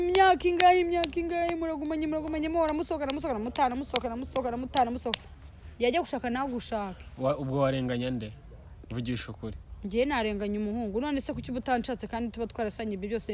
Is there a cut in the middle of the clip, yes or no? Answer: no